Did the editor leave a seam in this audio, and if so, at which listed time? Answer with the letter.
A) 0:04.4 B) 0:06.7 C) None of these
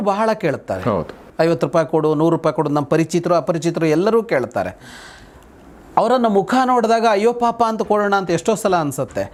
C